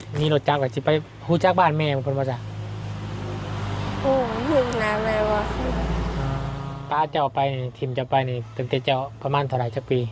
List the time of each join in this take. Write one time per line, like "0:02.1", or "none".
0:06.6